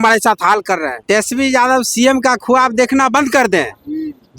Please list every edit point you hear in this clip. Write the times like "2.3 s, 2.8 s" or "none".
0.9 s